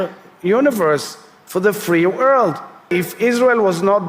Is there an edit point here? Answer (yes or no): yes